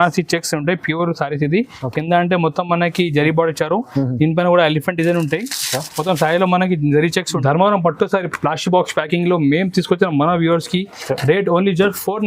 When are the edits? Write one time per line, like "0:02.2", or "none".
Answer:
0:07.3